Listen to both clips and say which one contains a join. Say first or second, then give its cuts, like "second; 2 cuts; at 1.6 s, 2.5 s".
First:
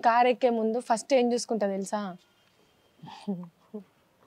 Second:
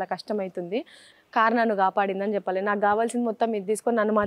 second; 1 cut; at 1.0 s